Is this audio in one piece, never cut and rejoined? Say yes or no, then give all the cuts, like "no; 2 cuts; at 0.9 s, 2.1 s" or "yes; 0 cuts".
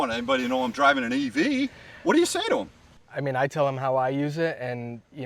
yes; 0 cuts